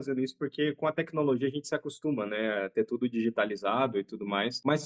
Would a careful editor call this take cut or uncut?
uncut